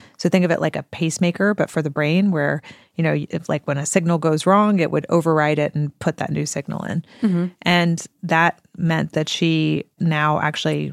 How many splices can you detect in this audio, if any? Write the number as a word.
zero